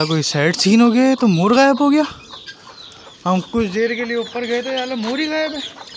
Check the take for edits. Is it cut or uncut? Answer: uncut